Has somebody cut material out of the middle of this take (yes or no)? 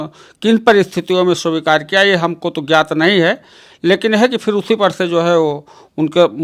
no